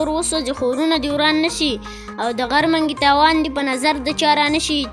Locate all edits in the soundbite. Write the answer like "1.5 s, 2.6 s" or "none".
none